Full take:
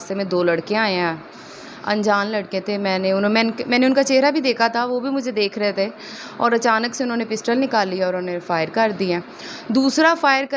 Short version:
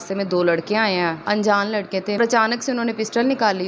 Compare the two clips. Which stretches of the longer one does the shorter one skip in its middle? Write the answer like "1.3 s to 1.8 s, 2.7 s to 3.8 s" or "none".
1.2 s to 1.8 s, 2.8 s to 6.5 s